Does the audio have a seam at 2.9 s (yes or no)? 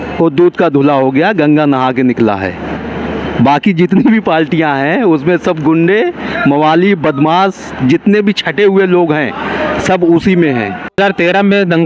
no